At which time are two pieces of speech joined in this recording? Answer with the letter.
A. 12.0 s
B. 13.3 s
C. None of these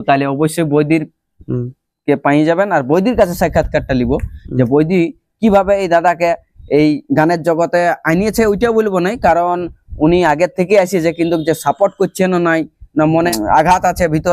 B